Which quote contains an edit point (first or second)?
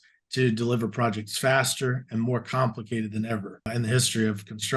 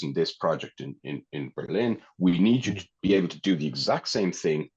first